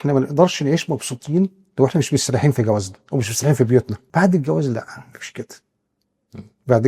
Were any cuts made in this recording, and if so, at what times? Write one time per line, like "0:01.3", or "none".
0:04.0

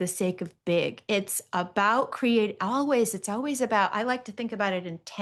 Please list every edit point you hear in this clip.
none

